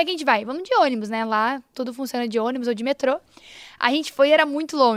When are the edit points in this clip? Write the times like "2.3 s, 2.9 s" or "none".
none